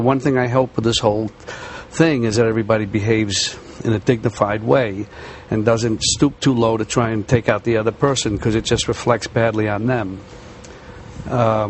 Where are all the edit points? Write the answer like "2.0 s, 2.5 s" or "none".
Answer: 8.4 s